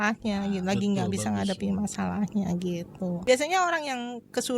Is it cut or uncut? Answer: cut